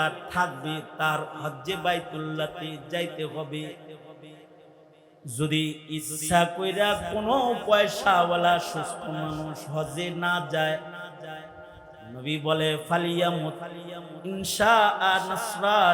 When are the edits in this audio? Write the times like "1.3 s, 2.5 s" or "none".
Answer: none

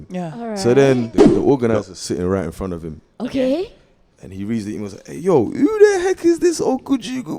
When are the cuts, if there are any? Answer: 1.2 s

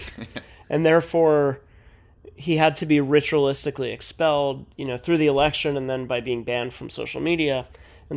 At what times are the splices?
none

